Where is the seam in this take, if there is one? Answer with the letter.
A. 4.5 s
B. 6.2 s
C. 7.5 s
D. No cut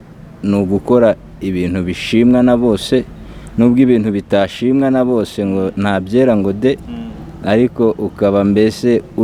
D